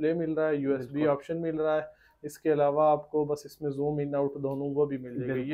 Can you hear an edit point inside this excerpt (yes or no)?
no